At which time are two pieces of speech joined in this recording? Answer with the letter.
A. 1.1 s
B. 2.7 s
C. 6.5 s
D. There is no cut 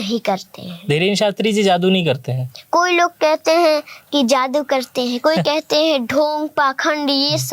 D